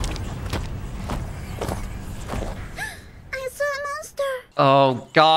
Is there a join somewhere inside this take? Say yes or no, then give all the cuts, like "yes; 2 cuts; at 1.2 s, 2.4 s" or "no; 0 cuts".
yes; 1 cut; at 4.5 s